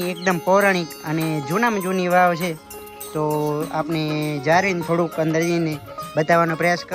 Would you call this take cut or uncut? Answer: uncut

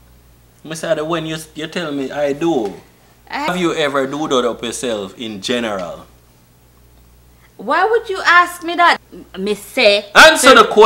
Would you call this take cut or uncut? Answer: cut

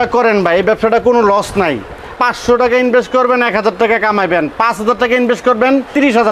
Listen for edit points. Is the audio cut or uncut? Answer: cut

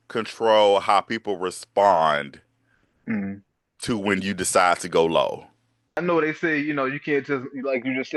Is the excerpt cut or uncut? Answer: cut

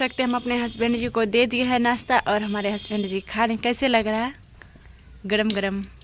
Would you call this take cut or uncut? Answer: uncut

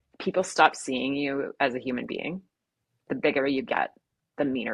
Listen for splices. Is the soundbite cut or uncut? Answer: cut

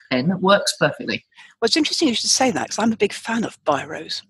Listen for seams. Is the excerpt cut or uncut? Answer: uncut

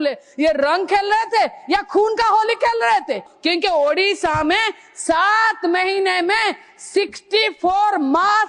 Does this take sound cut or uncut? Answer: cut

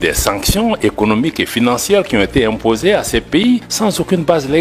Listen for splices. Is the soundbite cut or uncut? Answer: cut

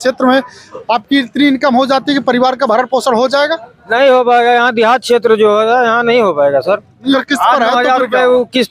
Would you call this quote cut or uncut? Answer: cut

